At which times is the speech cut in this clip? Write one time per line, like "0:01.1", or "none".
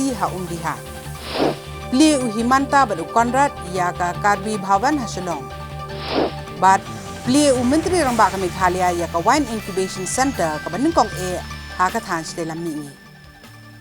0:12.9